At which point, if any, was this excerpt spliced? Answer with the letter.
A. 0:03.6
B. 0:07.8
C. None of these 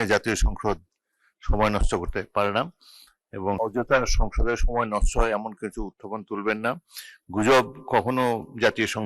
A